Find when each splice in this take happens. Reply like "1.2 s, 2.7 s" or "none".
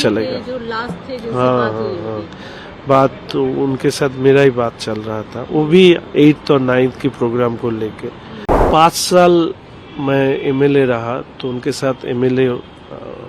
8.7 s